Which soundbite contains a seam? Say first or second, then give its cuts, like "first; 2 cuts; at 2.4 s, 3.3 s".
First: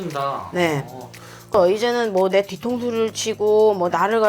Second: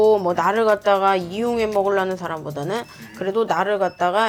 first; 1 cut; at 1.5 s